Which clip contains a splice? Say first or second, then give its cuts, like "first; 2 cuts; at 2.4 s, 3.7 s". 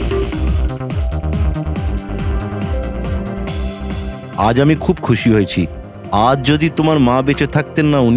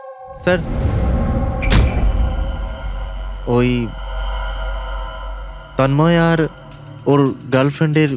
first; 1 cut; at 4.3 s